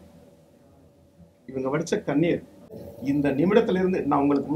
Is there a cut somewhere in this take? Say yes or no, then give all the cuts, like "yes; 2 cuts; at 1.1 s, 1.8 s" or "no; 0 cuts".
yes; 1 cut; at 2.9 s